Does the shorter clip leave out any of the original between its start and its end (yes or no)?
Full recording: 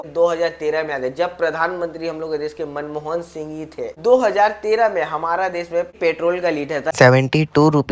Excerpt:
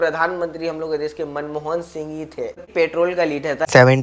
yes